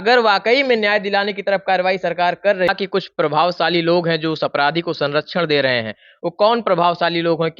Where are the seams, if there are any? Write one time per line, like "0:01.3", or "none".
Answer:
0:02.7